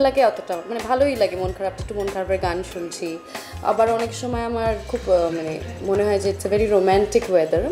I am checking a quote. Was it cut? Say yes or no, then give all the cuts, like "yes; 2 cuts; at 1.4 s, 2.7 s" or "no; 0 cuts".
no; 0 cuts